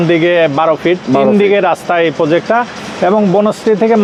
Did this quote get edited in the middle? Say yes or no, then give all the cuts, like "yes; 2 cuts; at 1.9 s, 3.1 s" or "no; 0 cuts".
no; 0 cuts